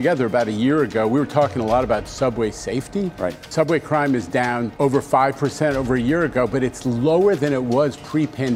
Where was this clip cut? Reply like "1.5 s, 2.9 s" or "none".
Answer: 3.4 s, 4.7 s